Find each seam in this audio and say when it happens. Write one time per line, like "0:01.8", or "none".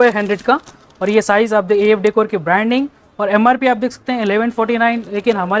none